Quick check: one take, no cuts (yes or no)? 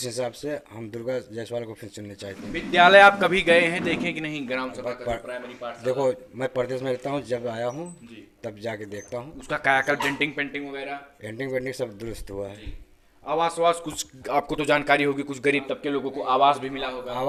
yes